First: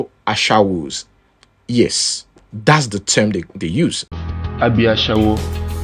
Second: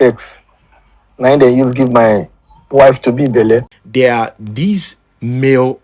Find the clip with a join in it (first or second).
second